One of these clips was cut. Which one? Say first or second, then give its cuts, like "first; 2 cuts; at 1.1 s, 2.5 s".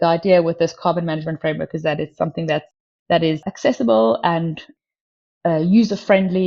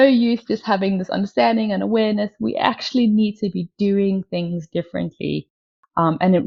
first; 2 cuts; at 2.7 s, 3.5 s